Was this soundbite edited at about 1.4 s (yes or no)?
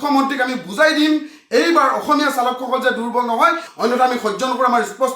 no